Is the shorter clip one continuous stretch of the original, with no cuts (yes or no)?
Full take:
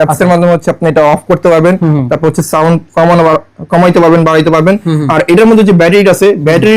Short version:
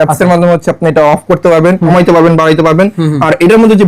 no